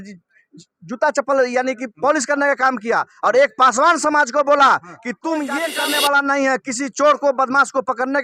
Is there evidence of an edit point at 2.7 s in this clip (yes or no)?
no